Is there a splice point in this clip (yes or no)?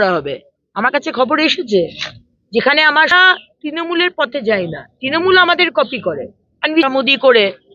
yes